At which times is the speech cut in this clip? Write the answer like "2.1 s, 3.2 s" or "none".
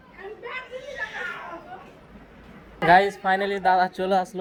none